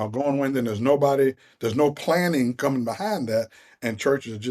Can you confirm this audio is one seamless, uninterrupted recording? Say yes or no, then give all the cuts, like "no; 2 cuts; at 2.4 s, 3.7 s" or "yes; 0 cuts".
yes; 0 cuts